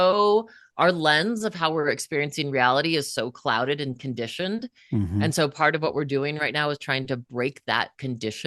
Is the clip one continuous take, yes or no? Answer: yes